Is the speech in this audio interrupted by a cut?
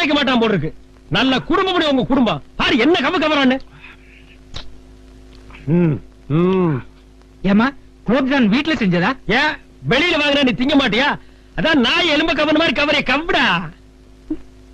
yes; 1 cut; at 6.1 s

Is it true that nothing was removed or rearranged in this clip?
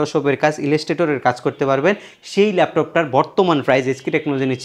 yes; 0 cuts

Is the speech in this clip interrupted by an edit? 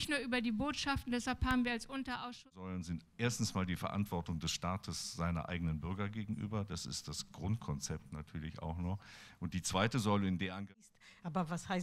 yes; 2 cuts; at 2.7 s, 10.6 s

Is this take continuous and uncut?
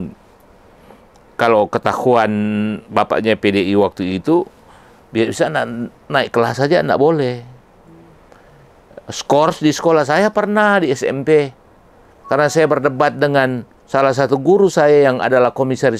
yes; 0 cuts

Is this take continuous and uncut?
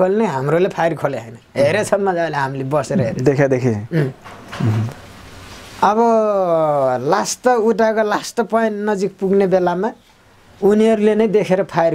yes; 0 cuts

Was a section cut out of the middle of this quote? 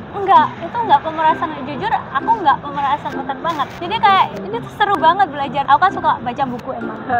yes; 2 cuts; at 3.8 s, 5.6 s

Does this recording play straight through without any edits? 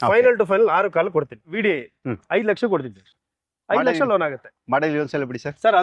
no; 1 cut; at 1.5 s

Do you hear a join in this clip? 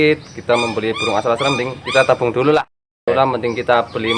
yes; 1 cut; at 3.1 s

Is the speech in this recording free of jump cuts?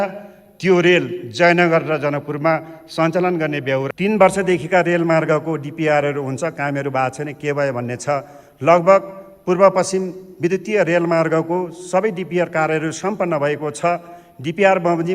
no; 1 cut; at 3.9 s

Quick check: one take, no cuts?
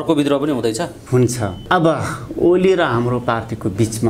no; 1 cut; at 1.5 s

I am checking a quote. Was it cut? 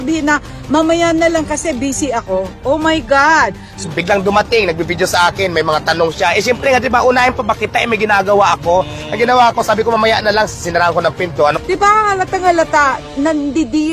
yes; 2 cuts; at 3.9 s, 11.5 s

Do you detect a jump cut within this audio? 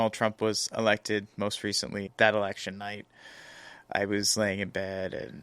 yes; 1 cut; at 2.1 s

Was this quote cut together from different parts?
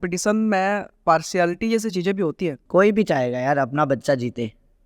yes; 2 cuts; at 0.9 s, 2.6 s

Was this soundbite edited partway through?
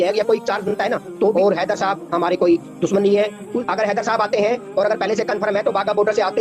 yes; 2 cuts; at 1.3 s, 3.5 s

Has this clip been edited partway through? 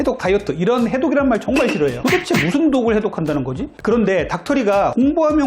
yes; 2 cuts; at 2.0 s, 3.7 s

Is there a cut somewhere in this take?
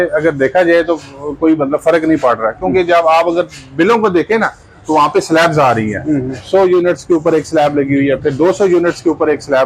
no; 0 cuts

